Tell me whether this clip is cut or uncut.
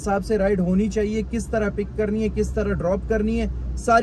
uncut